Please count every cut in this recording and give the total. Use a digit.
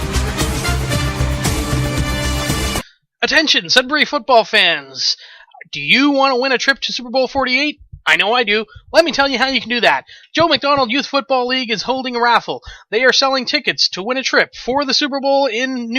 1